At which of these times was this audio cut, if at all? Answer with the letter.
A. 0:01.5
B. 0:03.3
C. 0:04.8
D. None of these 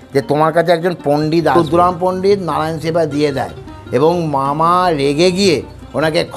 A